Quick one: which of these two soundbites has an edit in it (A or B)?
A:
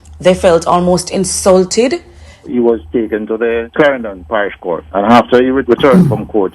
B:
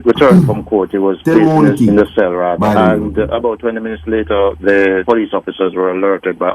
A